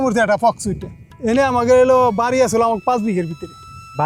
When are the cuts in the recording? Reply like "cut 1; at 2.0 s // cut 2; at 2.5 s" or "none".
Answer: cut 1; at 1.1 s